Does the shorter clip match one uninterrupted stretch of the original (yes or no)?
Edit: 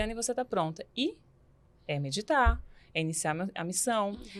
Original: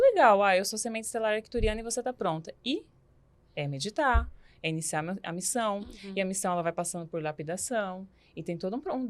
yes